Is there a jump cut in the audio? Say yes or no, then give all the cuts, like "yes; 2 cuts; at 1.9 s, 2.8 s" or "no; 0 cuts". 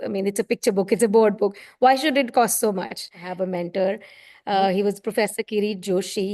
yes; 1 cut; at 3.2 s